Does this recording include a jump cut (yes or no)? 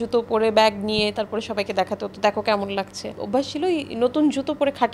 yes